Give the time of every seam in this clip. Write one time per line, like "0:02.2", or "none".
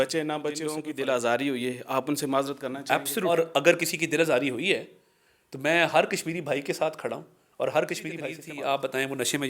0:00.9
0:03.3
0:08.4